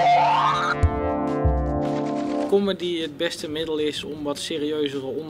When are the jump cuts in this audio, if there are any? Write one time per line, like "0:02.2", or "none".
0:02.5

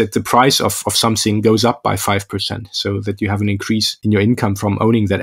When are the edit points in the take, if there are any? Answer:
0:04.0

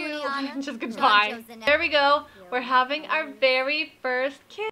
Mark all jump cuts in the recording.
0:01.5

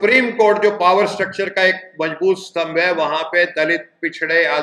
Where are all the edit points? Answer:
none

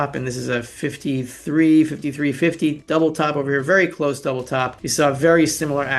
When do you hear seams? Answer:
0:02.8
0:04.8

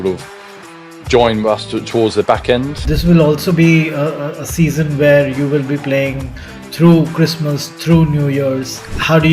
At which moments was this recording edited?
0:02.8

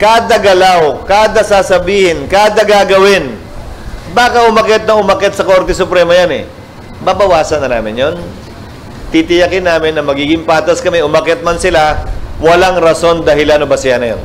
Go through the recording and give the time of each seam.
none

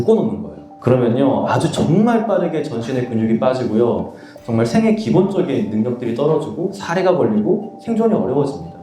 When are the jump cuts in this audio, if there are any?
none

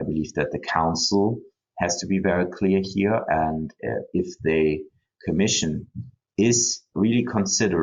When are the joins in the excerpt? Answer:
0:06.9

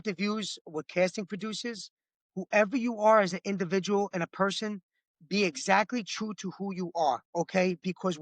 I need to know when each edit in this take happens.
0:07.3

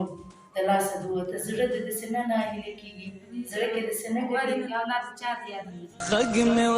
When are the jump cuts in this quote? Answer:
0:04.6
0:06.0

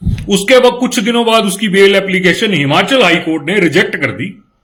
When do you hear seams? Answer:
none

